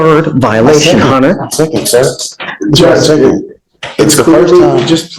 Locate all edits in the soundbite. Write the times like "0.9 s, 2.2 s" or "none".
none